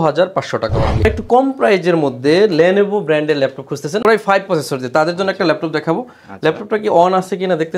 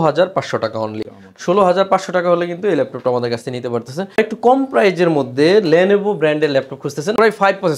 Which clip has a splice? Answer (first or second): first